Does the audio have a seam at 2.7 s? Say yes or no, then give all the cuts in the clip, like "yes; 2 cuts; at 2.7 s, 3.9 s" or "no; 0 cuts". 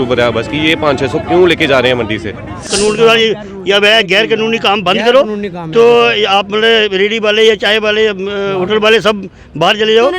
yes; 1 cut; at 2.7 s